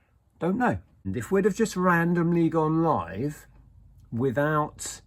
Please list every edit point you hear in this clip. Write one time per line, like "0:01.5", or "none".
0:01.1